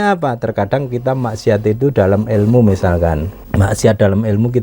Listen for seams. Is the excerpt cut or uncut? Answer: cut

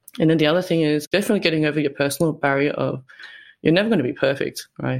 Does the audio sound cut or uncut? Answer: cut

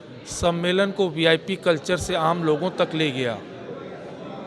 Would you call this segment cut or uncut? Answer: uncut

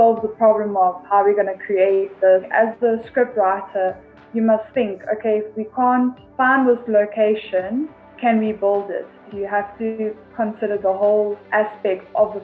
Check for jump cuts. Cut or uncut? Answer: cut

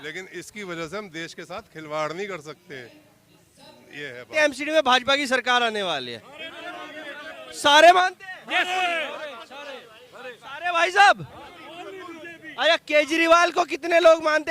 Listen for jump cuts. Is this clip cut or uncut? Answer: cut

